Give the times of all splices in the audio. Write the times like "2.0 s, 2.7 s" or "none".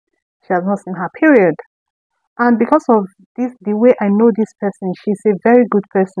none